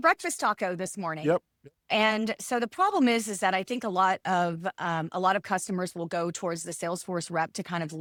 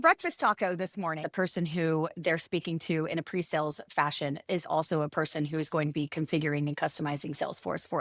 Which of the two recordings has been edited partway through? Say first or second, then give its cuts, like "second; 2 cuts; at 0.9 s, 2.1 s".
second; 1 cut; at 1.2 s